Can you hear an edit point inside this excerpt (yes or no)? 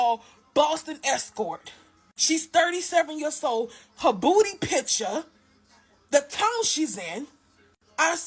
no